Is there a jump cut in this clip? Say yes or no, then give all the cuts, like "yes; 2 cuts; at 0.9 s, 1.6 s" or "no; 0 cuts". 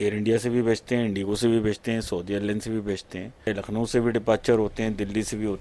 yes; 1 cut; at 3.5 s